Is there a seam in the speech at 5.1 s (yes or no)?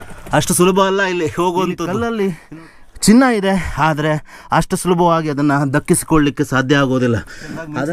no